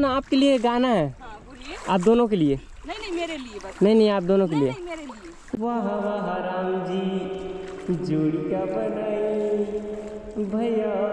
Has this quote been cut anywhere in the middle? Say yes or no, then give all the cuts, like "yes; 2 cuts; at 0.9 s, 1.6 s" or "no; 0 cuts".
no; 0 cuts